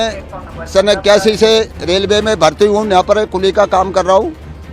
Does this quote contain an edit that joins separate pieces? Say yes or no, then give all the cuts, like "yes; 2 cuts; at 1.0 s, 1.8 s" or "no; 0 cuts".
no; 0 cuts